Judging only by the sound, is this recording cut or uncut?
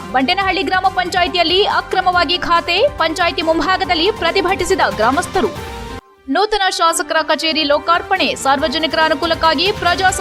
uncut